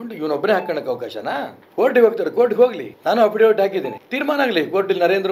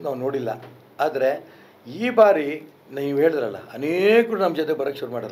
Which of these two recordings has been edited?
first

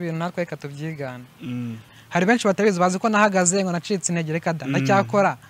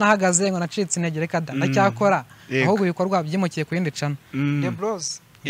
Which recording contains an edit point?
first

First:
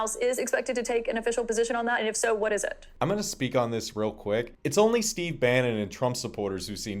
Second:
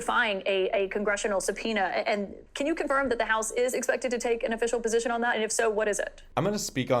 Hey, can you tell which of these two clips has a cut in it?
second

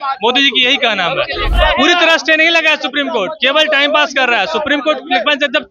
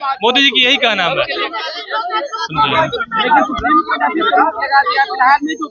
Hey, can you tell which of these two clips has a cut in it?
first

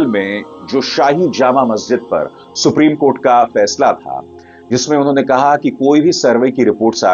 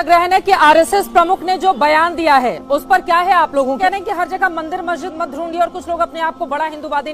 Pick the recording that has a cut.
second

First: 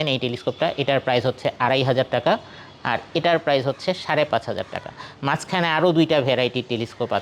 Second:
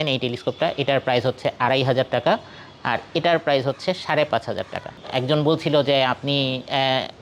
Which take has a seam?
second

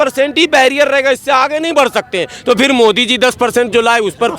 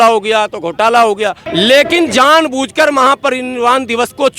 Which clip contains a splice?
second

